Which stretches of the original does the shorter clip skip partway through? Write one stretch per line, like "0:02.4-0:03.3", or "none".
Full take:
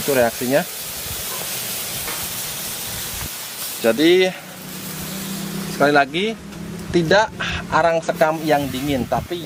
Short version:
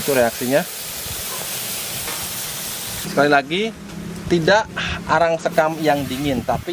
0:03.0-0:05.7